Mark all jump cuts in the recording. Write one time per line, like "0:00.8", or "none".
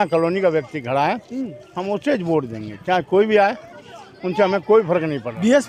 none